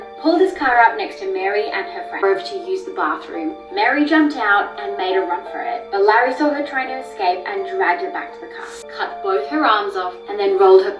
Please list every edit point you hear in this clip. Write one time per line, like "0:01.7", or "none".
0:02.2
0:08.8